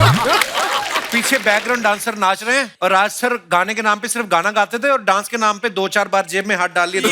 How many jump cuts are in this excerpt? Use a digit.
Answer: 2